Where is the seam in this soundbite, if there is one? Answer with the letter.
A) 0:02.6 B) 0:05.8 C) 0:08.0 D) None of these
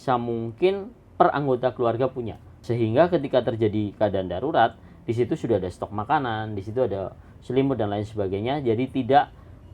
A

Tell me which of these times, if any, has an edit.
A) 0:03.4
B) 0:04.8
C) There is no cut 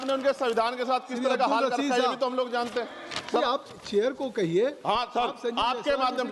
A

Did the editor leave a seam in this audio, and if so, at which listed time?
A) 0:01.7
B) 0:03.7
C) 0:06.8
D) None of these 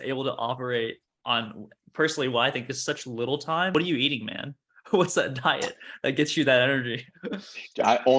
B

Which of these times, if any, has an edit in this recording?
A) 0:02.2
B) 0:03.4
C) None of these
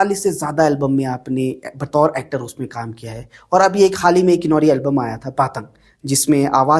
C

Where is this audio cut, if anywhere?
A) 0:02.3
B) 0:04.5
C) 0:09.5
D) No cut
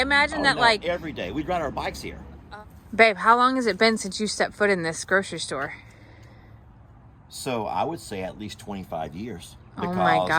A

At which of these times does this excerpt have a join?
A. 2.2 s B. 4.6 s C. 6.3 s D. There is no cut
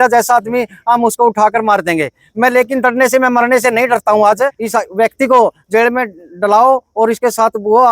B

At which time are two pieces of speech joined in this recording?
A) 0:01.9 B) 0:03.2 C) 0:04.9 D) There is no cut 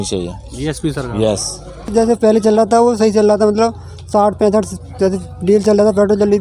A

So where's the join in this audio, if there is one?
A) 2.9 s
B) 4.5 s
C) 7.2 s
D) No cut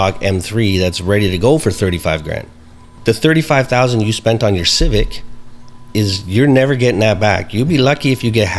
A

